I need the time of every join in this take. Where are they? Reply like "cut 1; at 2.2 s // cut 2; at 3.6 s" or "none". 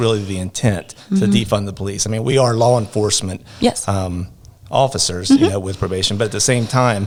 none